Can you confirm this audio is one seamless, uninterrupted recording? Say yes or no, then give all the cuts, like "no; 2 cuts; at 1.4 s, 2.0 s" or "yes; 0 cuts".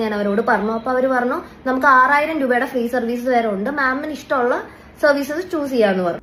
yes; 0 cuts